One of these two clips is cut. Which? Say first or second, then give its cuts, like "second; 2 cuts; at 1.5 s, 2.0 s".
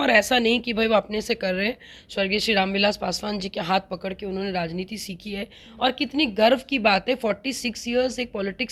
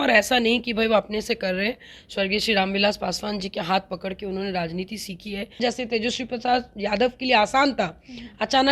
second; 1 cut; at 5.6 s